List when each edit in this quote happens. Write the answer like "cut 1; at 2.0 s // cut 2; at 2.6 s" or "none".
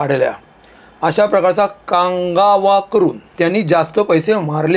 cut 1; at 3.2 s